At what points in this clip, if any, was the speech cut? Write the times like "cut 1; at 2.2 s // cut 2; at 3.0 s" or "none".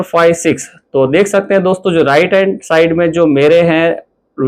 none